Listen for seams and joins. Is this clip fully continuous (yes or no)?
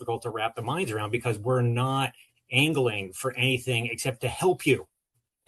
yes